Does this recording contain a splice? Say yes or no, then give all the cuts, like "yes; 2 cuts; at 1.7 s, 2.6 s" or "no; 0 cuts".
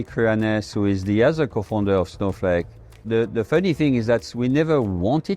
yes; 1 cut; at 3.0 s